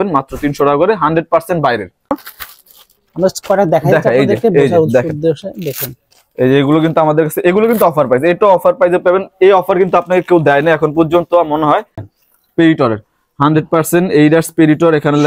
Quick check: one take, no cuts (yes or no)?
no